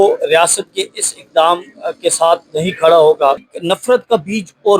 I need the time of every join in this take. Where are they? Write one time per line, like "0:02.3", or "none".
0:03.5